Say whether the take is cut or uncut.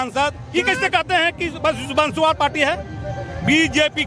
uncut